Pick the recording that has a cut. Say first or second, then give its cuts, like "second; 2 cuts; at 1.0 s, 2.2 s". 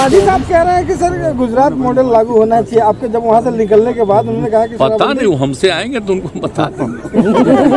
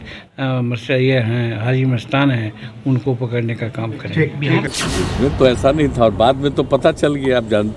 second; 1 cut; at 4.7 s